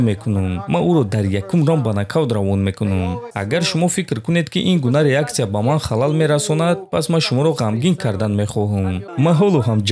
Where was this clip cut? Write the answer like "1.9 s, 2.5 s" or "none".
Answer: 3.2 s, 9.0 s